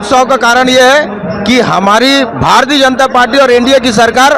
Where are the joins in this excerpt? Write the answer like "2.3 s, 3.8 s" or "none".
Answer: none